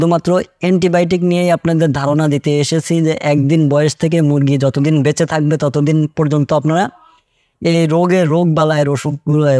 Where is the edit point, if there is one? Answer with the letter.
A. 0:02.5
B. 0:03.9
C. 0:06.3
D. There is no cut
D